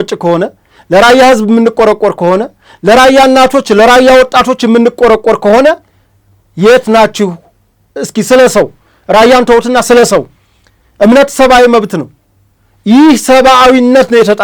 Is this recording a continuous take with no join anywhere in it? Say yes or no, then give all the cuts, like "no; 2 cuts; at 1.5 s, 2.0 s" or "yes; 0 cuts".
yes; 0 cuts